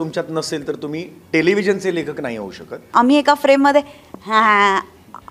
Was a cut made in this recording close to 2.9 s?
yes; 1 cut; at 2.9 s

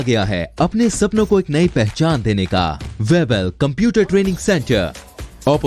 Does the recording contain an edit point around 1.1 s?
no; 1 cut; at 2.8 s

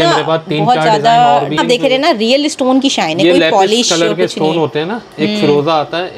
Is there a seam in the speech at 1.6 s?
yes; 1 cut; at 1.6 s

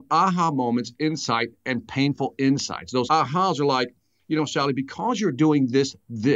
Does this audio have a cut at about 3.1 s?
yes; 1 cut; at 3.1 s

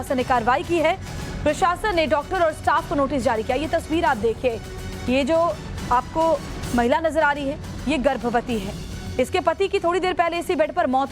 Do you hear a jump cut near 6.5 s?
yes; 1 cut; at 6.5 s

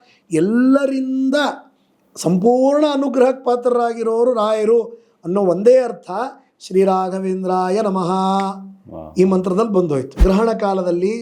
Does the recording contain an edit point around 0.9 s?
no; 1 cut; at 10.1 s

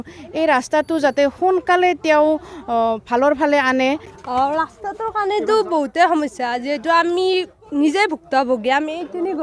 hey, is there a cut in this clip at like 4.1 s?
yes; 1 cut; at 4.1 s

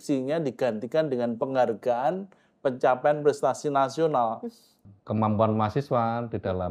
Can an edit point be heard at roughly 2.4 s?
no; 1 cut; at 4.8 s

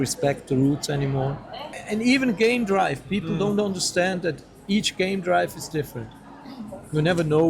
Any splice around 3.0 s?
no; 1 cut; at 1.8 s

